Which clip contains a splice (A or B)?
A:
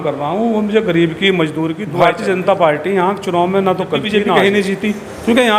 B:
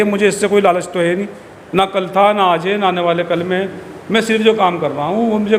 A